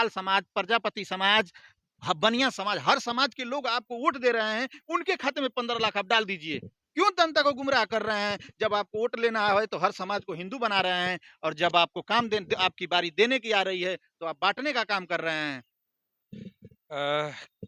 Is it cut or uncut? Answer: uncut